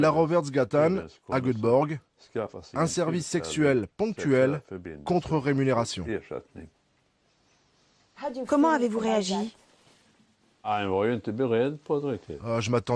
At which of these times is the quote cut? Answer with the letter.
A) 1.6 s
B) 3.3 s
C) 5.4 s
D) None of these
B